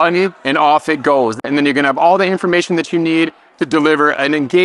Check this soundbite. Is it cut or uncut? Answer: cut